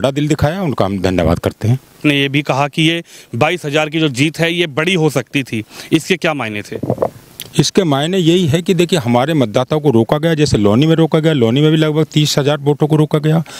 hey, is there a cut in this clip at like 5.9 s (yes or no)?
no